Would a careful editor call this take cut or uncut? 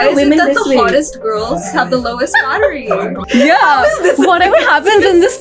cut